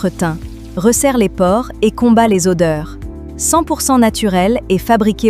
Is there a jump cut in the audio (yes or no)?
no